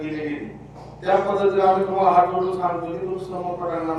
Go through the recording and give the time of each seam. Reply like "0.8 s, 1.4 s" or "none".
none